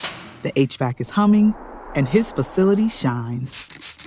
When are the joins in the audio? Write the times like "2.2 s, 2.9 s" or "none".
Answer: none